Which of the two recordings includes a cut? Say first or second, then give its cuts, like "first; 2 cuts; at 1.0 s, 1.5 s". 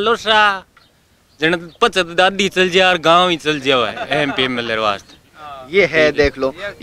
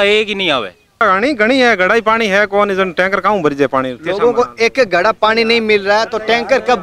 second; 1 cut; at 1.0 s